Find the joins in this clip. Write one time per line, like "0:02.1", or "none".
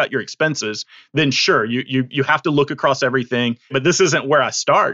0:03.7